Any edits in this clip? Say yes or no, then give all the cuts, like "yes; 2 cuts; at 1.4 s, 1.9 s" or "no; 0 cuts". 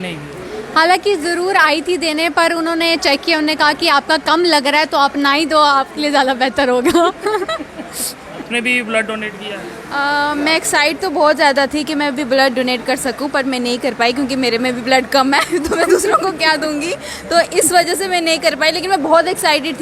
yes; 1 cut; at 8.5 s